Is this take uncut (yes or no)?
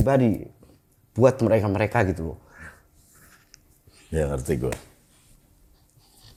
yes